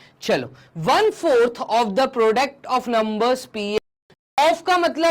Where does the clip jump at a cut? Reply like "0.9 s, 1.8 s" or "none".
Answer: 3.8 s

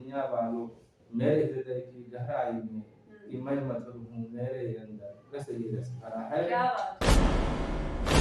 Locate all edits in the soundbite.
6.9 s

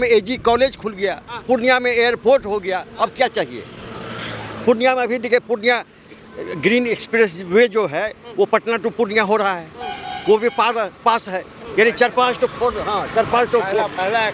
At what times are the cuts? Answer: none

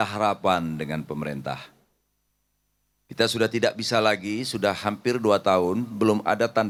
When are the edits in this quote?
none

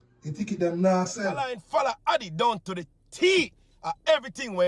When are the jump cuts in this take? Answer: 1.6 s

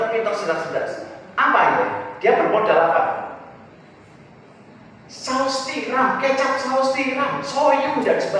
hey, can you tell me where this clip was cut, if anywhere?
none

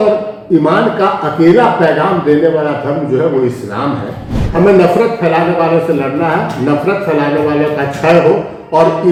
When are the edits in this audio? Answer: none

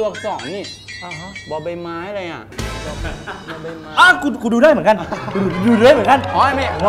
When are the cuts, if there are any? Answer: none

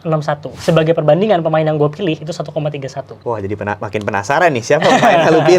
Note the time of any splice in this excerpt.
3.1 s

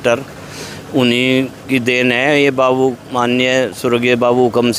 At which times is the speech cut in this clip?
none

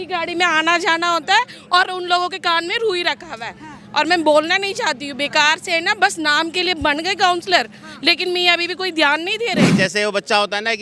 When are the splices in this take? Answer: 9.7 s

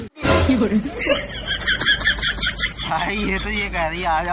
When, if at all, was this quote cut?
none

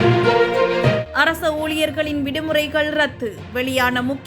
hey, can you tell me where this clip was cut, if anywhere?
1.1 s

